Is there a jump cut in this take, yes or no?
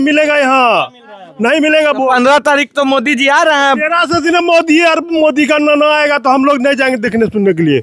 no